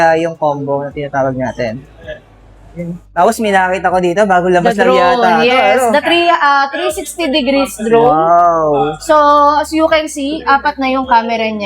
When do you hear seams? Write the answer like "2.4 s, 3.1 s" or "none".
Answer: 3.2 s